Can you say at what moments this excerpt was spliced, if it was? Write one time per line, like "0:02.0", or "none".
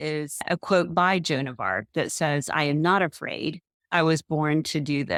none

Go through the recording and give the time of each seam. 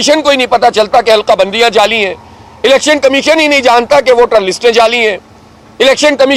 none

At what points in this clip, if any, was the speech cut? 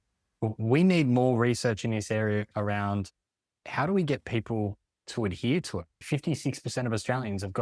0:06.0

